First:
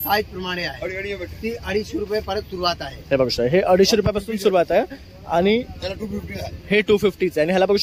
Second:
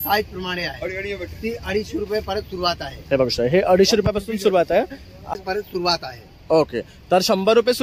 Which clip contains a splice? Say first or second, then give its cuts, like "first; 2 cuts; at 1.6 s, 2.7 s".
second; 1 cut; at 5.3 s